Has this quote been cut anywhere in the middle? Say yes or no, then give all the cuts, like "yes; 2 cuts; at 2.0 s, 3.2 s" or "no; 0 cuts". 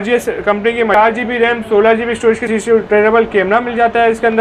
yes; 2 cuts; at 0.9 s, 2.4 s